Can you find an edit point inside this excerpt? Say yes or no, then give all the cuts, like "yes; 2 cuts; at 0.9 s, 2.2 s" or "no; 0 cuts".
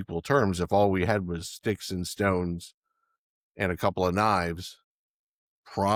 no; 0 cuts